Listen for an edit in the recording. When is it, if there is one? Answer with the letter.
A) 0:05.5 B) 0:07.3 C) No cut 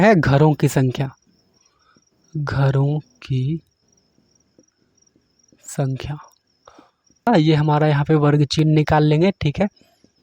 B